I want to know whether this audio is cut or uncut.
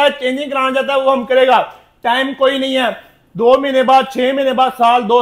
uncut